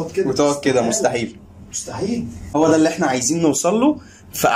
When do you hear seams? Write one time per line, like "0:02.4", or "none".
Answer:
0:02.5

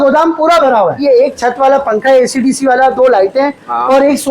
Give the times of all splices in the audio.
0:01.0

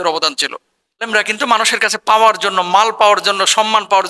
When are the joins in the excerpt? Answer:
0:01.1

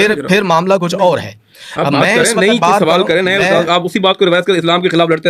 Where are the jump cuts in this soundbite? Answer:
none

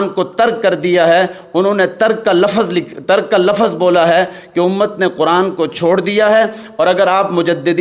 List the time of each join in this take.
none

